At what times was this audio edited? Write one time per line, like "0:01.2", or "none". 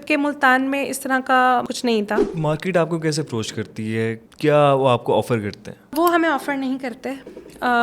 0:01.9
0:04.2
0:05.9